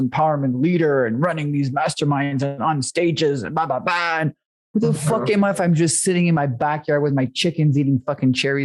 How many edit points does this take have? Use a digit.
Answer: 0